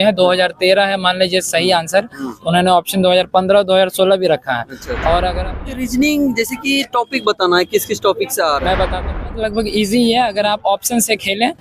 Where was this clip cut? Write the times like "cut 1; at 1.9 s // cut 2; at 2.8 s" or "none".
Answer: cut 1; at 5.6 s // cut 2; at 9.2 s